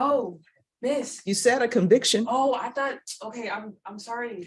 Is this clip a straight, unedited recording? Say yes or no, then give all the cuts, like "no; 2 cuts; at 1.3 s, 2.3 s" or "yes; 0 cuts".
yes; 0 cuts